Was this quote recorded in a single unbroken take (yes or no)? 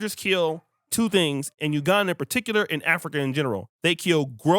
no